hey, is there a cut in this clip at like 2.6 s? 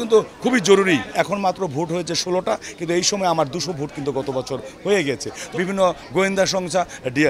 no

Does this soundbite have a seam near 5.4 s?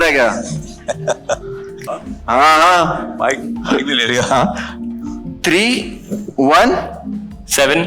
no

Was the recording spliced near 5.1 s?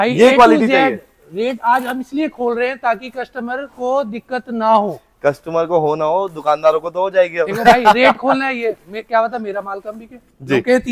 no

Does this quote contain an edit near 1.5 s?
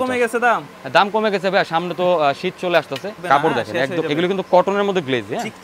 no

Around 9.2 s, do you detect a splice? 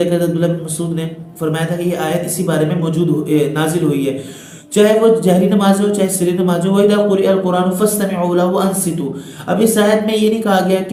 no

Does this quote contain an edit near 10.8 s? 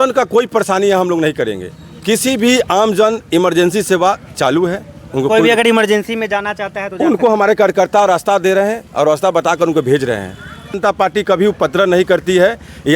yes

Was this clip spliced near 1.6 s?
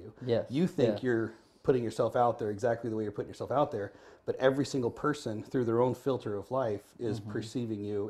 no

